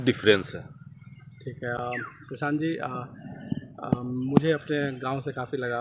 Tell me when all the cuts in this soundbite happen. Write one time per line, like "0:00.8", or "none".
none

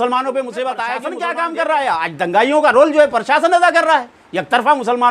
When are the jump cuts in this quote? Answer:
0:01.1

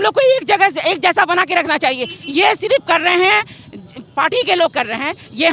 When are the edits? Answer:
none

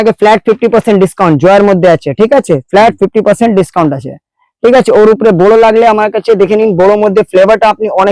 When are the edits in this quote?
none

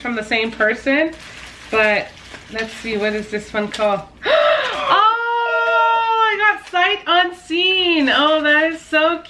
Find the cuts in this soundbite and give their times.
none

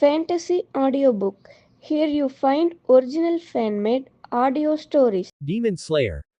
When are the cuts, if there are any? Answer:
0:05.4

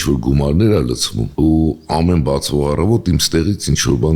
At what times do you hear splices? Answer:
none

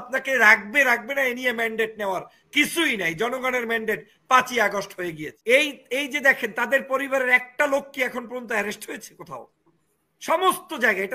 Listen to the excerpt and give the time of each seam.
0:05.3

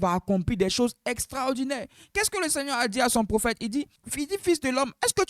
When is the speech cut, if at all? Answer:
0:04.0

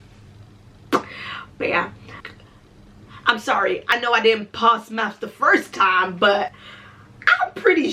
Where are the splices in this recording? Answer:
0:02.1

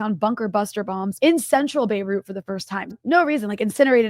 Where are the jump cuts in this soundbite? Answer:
0:01.1
0:02.8

